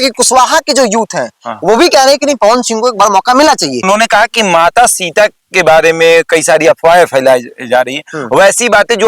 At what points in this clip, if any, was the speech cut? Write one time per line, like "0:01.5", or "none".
0:03.8